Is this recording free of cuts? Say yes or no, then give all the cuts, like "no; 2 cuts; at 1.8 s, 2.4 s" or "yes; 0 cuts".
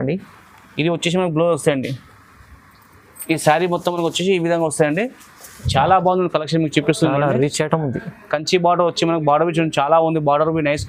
yes; 0 cuts